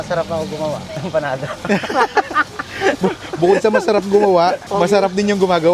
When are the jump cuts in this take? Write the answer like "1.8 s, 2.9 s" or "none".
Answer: none